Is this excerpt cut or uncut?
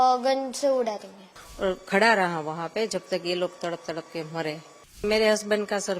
cut